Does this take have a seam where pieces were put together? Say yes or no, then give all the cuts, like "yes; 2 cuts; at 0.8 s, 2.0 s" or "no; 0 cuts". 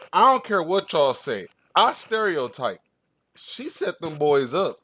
no; 0 cuts